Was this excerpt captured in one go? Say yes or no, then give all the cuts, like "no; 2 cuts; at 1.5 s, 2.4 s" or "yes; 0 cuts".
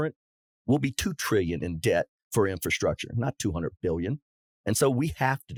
yes; 0 cuts